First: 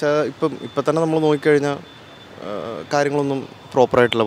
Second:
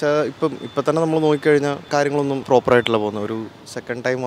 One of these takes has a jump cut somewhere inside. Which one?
second; 1 cut; at 2.3 s

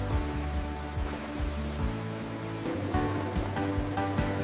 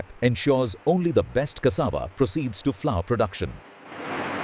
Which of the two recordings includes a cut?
first; 1 cut; at 2.6 s

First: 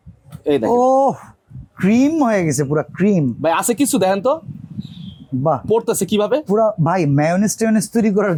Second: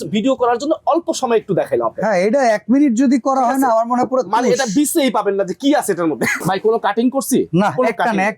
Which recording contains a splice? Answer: second; 1 cut; at 6.4 s

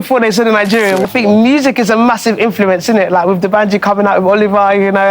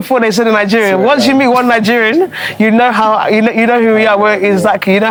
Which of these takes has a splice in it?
first; 1 cut; at 1.0 s

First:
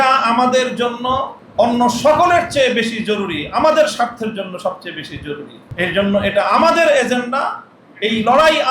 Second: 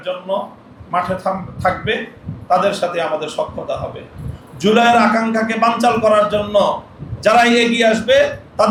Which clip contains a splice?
first; 2 cuts; at 1.4 s, 5.6 s

